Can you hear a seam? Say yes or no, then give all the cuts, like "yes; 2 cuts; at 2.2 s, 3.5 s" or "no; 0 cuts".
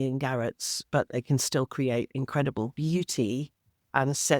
no; 0 cuts